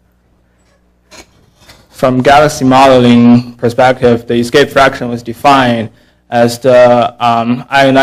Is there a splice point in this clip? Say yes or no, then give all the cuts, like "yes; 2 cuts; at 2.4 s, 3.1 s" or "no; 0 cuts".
yes; 1 cut; at 3.8 s